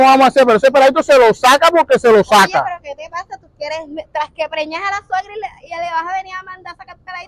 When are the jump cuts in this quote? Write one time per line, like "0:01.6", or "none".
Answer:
none